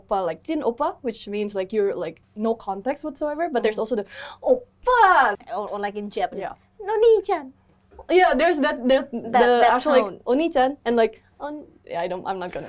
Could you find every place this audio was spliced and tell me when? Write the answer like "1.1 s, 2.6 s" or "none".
2.2 s, 5.4 s